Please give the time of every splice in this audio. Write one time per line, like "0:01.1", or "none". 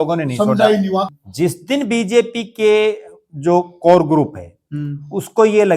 0:01.1